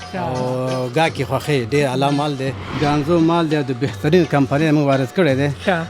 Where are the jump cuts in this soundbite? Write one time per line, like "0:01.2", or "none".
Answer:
0:02.8